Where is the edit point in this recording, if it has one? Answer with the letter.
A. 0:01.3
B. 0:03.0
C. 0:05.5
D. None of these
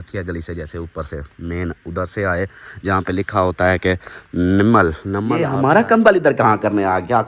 C